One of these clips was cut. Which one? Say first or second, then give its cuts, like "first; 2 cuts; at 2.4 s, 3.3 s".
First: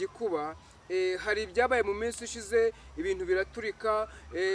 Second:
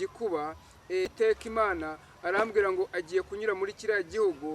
second; 1 cut; at 1.1 s